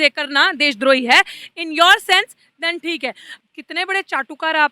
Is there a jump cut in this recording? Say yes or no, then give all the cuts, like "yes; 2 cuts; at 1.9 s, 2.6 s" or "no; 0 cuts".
yes; 1 cut; at 3.3 s